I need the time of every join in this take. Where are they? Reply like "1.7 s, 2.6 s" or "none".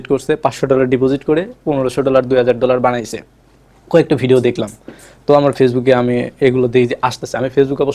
none

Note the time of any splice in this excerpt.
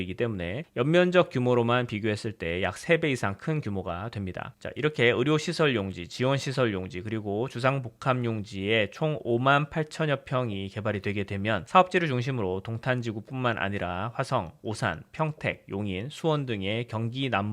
4.5 s

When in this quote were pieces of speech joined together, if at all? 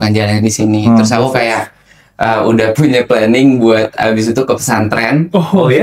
none

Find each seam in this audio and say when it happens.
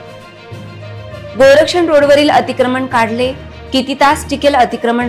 1.3 s

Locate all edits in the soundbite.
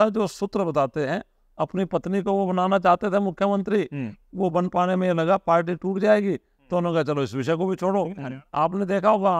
8.2 s

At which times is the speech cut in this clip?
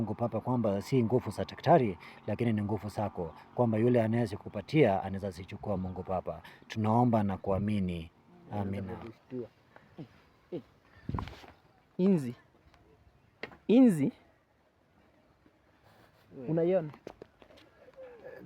9.0 s

